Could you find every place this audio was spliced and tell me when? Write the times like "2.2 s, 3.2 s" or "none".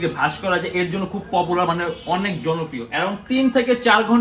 2.8 s